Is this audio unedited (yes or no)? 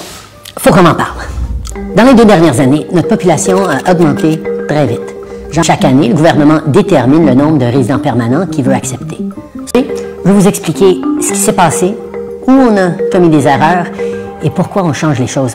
no